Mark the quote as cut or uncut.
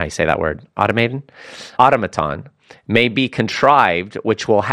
cut